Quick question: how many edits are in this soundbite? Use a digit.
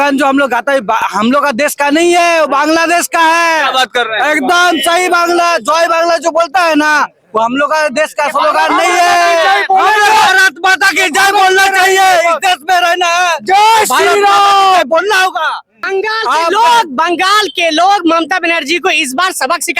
1